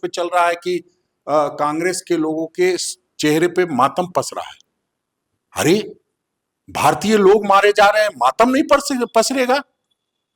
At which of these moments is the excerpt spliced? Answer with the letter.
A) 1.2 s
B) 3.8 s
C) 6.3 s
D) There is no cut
D